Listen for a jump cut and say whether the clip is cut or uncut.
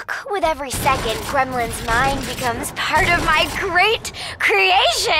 uncut